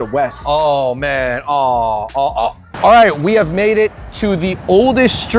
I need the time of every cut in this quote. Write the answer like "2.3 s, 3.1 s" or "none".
2.7 s